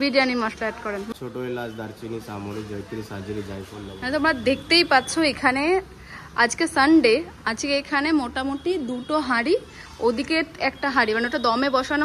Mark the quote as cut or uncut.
cut